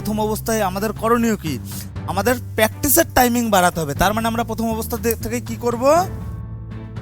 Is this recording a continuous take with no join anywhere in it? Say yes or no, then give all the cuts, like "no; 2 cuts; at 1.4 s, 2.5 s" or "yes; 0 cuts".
no; 1 cut; at 6.1 s